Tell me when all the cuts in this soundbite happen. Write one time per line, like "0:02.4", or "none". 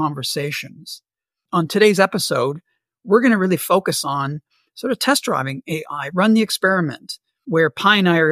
0:01.4